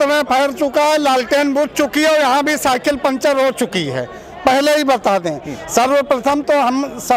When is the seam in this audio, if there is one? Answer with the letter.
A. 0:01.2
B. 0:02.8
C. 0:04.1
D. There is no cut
D